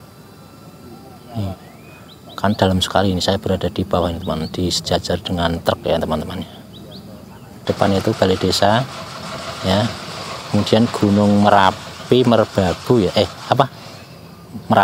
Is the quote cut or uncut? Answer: cut